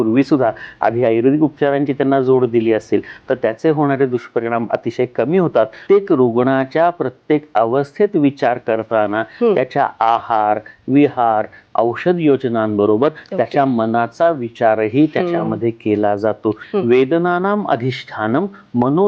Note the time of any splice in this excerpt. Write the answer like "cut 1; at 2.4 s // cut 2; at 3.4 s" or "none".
cut 1; at 5.8 s // cut 2; at 16.6 s